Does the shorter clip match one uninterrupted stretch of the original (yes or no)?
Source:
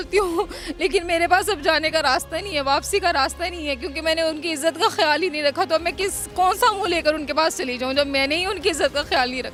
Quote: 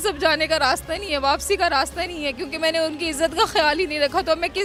yes